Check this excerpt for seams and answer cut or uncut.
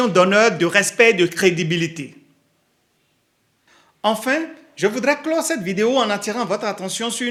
uncut